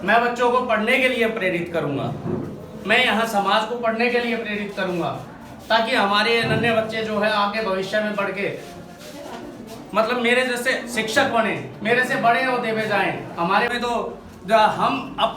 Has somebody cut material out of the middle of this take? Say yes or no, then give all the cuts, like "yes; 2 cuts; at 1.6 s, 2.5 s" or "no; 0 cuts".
yes; 1 cut; at 13.7 s